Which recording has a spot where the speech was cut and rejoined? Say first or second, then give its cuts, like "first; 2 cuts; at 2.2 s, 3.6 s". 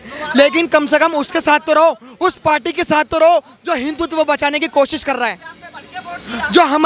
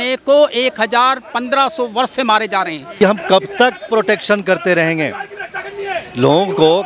second; 1 cut; at 2.8 s